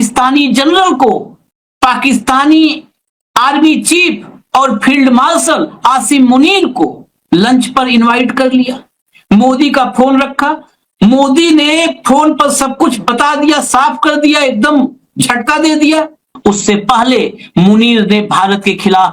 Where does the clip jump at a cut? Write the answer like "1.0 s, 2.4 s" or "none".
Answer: 16.3 s